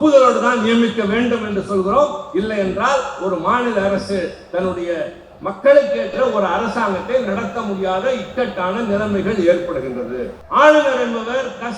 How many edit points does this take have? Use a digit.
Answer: 1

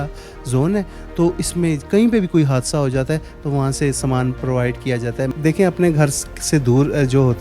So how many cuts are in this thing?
1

